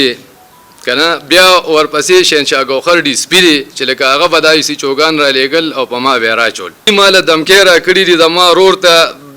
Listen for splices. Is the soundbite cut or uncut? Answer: cut